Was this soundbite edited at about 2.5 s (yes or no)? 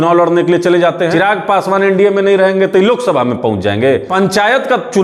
no